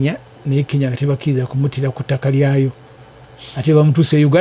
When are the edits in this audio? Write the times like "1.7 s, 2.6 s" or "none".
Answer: none

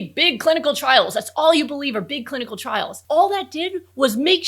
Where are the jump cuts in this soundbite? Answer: 3.0 s

